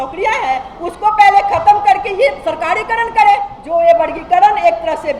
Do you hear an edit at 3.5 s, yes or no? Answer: yes